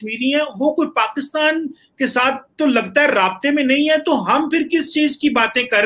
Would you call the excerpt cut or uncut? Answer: uncut